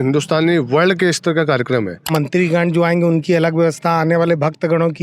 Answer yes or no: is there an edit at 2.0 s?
yes